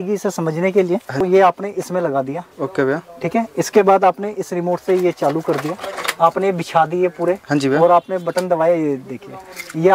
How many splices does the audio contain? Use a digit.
1